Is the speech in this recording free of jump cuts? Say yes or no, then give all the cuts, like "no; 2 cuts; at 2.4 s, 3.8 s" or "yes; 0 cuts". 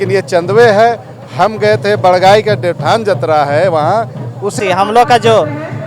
no; 1 cut; at 4.6 s